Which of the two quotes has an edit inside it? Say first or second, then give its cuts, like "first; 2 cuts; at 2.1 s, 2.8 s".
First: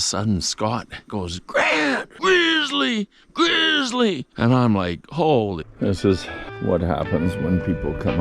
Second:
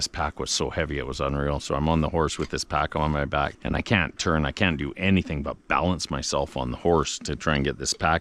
first; 4 cuts; at 1.1 s, 2.1 s, 4.3 s, 5.7 s